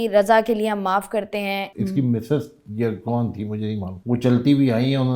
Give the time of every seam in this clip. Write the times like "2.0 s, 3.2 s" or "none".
1.7 s, 3.9 s